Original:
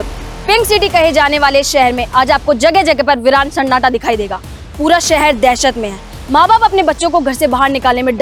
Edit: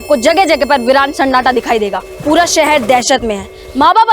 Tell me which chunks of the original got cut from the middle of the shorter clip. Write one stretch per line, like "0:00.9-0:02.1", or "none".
0:04.4-0:04.6